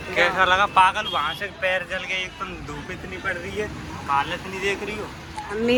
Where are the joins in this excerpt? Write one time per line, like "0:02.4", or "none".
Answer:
none